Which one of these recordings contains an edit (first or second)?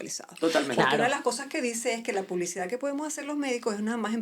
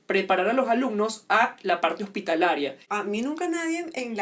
second